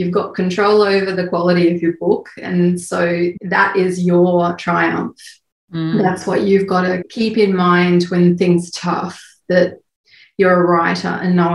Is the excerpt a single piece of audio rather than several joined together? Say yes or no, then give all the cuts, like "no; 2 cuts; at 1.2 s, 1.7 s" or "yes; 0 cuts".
no; 1 cut; at 7.0 s